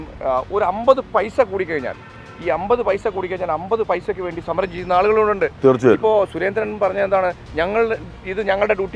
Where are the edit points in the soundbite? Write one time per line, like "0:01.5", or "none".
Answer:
none